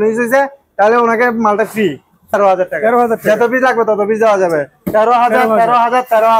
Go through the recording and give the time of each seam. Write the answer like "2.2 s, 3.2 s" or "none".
2.3 s